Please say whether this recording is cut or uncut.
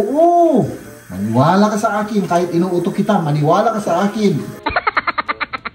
cut